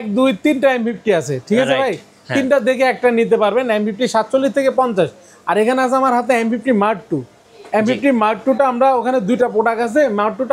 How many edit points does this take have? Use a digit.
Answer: 0